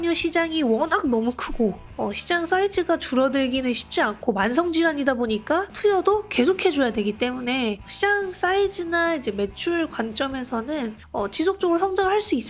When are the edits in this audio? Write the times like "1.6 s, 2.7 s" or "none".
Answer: none